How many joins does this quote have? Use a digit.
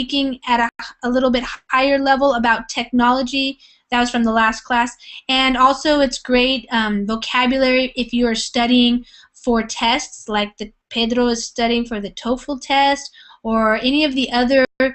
0